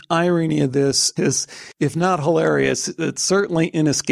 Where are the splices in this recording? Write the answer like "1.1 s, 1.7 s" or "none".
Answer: 1.1 s

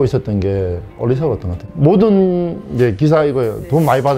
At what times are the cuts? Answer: 1.5 s

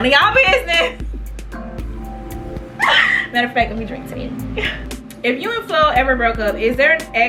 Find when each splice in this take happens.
5.0 s

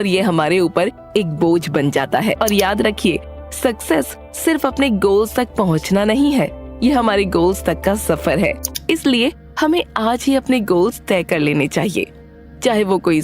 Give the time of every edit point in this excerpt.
2.4 s, 8.7 s

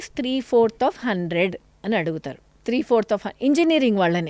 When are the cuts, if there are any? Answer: 2.4 s

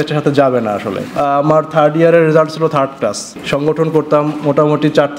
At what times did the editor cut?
1.2 s, 3.3 s

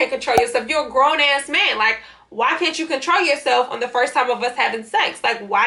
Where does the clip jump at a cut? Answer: none

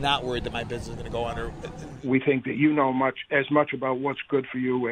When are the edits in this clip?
1.9 s

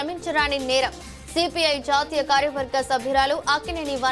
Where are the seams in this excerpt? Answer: none

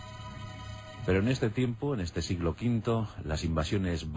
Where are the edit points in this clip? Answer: 2.6 s

